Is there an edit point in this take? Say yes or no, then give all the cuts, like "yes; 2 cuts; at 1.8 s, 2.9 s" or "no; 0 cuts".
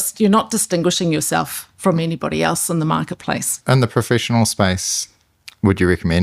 yes; 1 cut; at 3.5 s